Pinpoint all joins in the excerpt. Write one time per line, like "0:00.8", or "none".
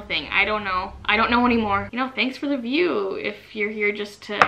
0:01.9